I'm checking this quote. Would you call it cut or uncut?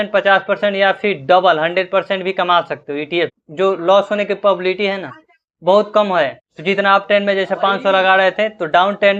cut